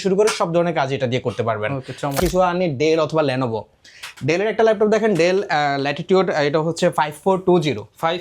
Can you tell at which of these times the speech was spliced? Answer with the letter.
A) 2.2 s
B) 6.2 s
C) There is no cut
A